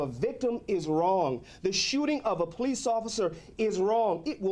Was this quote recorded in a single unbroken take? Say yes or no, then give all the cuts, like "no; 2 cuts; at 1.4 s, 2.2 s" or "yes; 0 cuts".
yes; 0 cuts